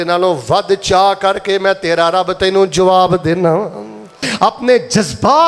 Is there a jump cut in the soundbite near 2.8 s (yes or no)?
no